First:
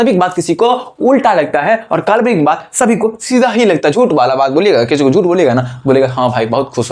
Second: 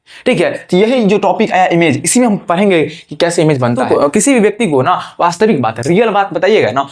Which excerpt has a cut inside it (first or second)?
second